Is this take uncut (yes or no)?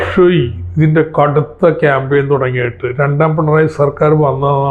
yes